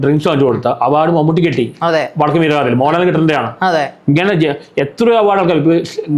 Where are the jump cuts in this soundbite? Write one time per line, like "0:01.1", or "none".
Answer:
none